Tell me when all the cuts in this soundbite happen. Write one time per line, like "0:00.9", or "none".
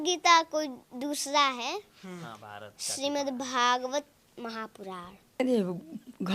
0:05.4